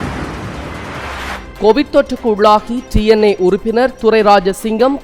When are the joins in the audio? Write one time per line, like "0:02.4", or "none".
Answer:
0:01.4